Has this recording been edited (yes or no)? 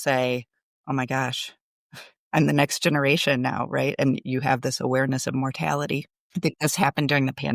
no